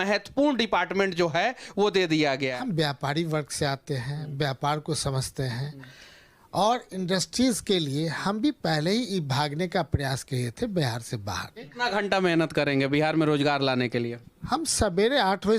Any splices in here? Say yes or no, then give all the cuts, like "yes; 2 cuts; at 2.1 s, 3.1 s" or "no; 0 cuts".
yes; 2 cuts; at 2.5 s, 11.7 s